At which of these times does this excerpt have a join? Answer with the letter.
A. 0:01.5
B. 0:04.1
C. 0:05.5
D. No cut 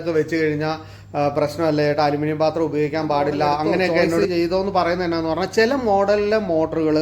B